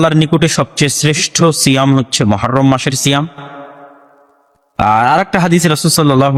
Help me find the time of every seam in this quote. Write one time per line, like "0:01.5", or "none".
none

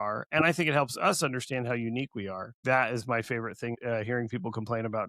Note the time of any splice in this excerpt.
0:02.6
0:03.8

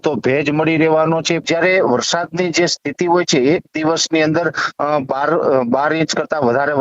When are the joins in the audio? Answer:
0:01.4

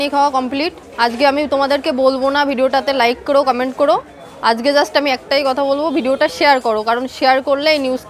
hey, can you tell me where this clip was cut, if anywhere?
none

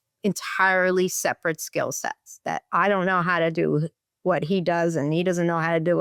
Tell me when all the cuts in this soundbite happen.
none

